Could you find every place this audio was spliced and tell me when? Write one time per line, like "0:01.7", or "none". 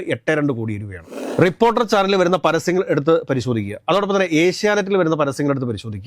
0:01.3